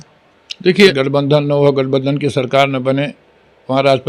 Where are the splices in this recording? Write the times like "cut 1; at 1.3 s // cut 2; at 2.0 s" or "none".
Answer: cut 1; at 0.9 s

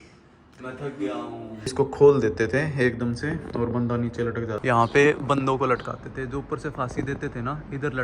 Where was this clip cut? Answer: cut 1; at 1.6 s // cut 2; at 4.5 s

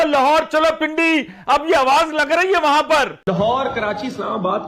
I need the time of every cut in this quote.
cut 1; at 3.2 s

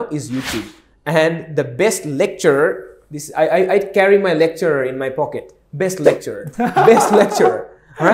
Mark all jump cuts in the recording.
none

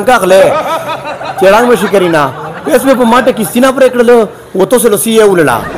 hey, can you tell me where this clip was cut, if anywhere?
none

